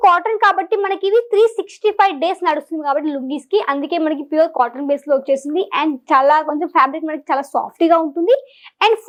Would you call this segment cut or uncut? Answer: uncut